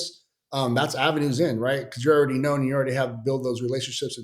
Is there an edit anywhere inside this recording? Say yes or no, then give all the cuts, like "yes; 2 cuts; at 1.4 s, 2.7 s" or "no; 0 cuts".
no; 0 cuts